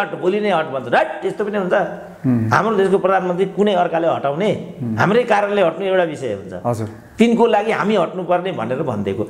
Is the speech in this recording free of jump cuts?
yes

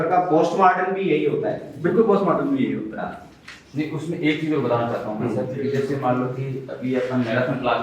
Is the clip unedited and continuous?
yes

